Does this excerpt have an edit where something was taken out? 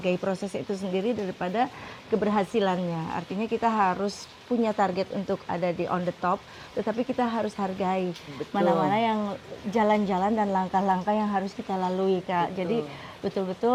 no; 0 cuts

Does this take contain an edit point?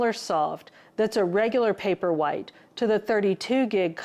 no; 0 cuts

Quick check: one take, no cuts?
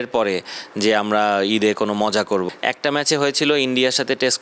no; 1 cut; at 2.5 s

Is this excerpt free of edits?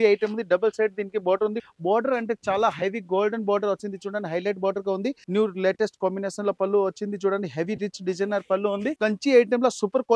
no; 3 cuts; at 1.6 s, 5.2 s, 8.9 s

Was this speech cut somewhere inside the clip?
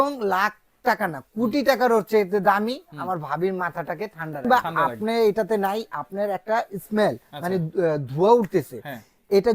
yes; 1 cut; at 4.4 s

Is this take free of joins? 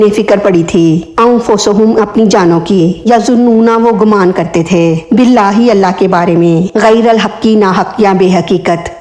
yes; 0 cuts

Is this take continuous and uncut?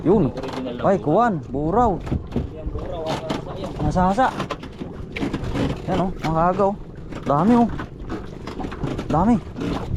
yes; 0 cuts

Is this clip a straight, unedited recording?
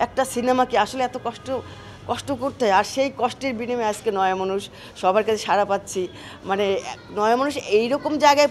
yes; 0 cuts

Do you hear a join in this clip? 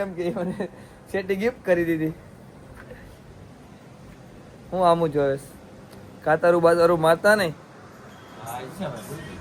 no; 0 cuts

